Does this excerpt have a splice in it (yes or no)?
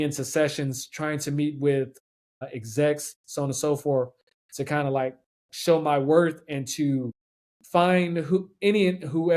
no